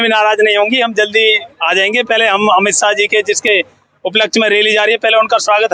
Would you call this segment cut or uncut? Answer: uncut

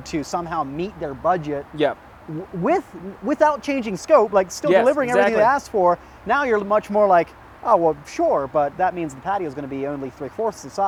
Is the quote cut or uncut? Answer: uncut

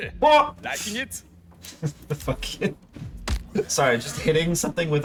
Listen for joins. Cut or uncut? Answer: uncut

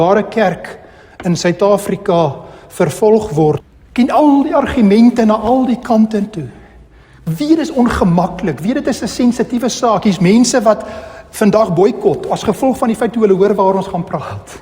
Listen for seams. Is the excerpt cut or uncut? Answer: cut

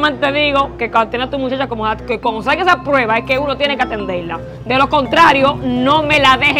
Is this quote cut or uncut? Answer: uncut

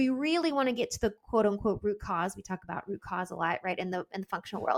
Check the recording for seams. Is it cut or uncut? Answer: uncut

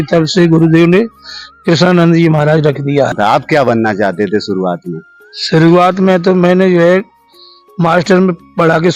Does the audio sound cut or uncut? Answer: cut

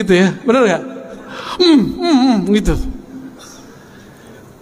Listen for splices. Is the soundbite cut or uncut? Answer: uncut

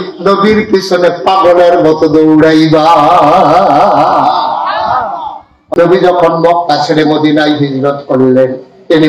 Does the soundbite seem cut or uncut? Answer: cut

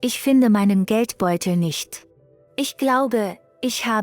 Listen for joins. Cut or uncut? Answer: cut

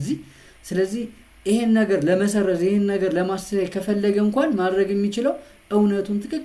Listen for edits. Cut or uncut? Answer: uncut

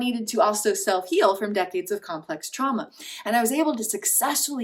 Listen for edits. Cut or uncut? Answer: uncut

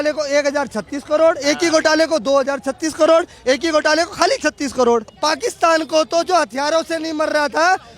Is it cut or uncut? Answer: cut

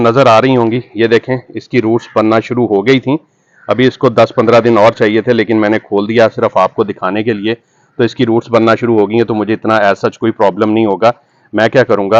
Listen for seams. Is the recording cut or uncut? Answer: uncut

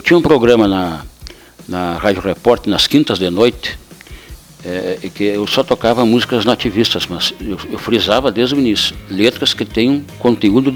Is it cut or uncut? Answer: uncut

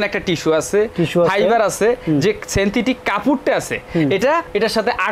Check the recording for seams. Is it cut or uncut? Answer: uncut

